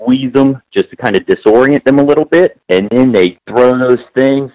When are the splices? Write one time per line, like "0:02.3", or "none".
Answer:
0:02.6
0:03.4